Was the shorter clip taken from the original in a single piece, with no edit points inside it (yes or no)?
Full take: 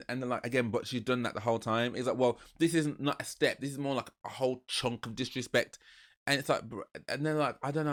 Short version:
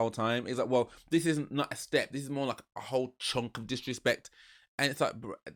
yes